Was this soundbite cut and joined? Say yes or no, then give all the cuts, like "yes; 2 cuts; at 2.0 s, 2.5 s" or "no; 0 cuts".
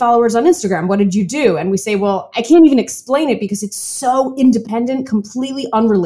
yes; 1 cut; at 2.3 s